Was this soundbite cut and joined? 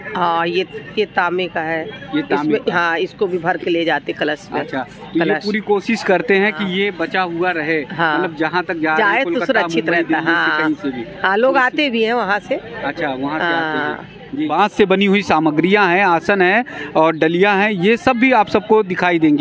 yes; 1 cut; at 14.5 s

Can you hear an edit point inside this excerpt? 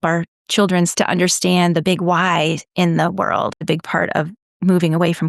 yes; 2 cuts; at 0.9 s, 3.6 s

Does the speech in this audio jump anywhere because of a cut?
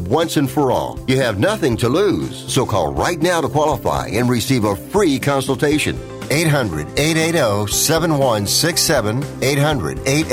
no; 0 cuts

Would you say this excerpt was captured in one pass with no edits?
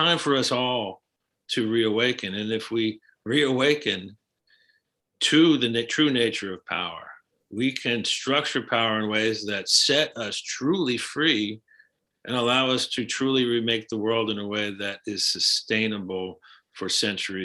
yes; 0 cuts

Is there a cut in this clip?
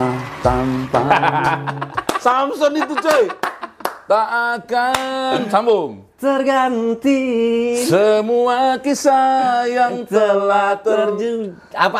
no; 0 cuts

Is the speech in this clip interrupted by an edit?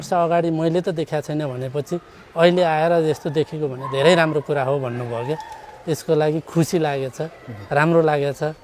no; 0 cuts

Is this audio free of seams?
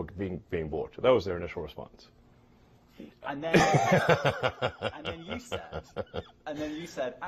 yes; 0 cuts

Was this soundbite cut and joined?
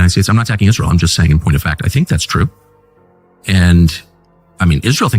yes; 1 cut; at 1.4 s

